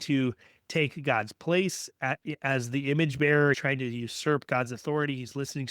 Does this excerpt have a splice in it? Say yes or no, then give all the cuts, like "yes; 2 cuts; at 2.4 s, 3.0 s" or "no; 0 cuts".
yes; 1 cut; at 3.6 s